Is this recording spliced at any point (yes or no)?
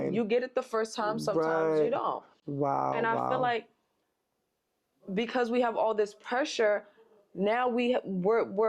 no